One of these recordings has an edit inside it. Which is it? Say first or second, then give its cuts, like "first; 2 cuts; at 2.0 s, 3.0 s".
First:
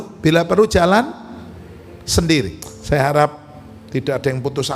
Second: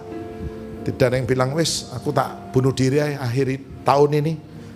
first; 1 cut; at 2.6 s